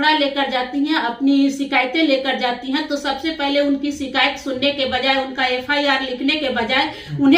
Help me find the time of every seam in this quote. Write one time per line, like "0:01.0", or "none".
none